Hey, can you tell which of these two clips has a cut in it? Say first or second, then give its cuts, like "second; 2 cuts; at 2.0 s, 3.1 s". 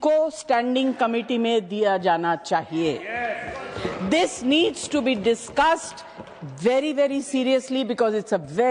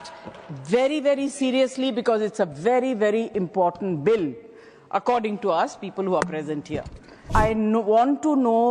second; 1 cut; at 7.3 s